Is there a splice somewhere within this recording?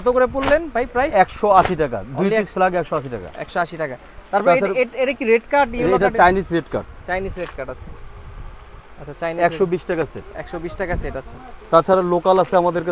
no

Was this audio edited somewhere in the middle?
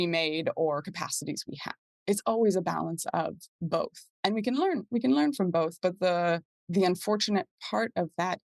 yes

